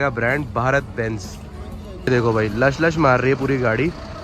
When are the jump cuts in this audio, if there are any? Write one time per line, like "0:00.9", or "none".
0:02.1